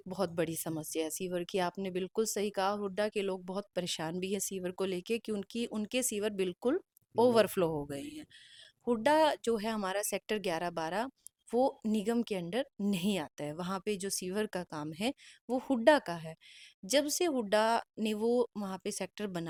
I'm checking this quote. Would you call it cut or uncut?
uncut